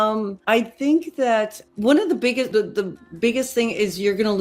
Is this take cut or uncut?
cut